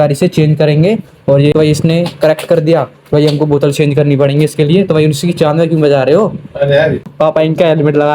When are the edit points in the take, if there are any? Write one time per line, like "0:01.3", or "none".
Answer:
0:01.5
0:07.1